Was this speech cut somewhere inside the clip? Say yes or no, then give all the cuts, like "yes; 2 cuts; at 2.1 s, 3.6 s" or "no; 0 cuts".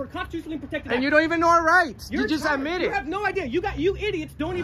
no; 0 cuts